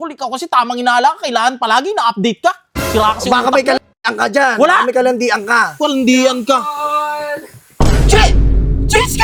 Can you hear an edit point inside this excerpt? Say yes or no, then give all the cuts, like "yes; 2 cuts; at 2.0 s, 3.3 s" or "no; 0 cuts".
no; 0 cuts